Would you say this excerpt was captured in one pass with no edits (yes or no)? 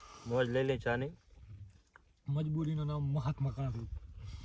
yes